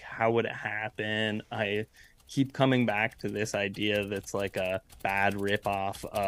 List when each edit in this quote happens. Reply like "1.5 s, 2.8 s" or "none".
4.9 s